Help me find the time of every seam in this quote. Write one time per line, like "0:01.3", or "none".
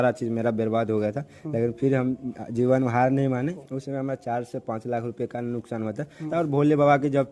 0:03.6
0:06.3